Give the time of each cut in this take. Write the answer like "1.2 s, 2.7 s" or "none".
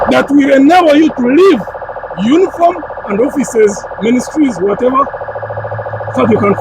none